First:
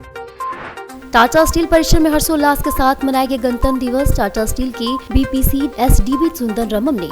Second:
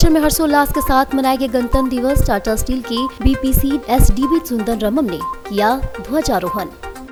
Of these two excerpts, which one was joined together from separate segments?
first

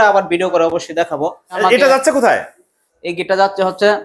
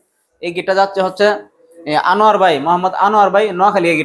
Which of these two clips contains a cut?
first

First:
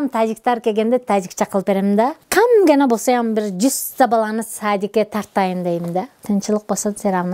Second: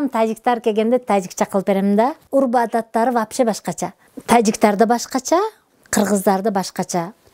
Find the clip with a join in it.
first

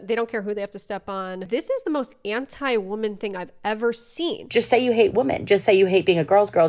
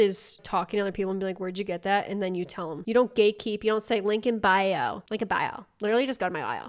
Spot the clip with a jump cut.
first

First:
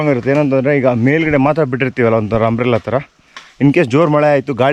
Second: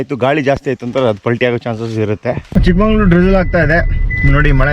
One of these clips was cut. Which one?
second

